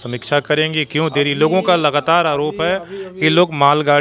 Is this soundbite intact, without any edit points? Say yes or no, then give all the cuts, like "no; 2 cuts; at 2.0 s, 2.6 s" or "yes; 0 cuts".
yes; 0 cuts